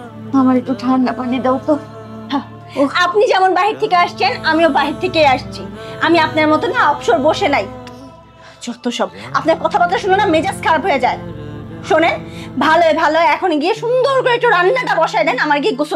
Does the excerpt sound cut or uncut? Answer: uncut